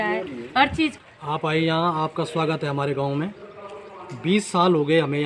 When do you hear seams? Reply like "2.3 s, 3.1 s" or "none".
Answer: none